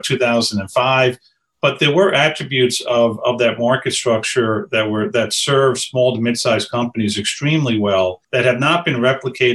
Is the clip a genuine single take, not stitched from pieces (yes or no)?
no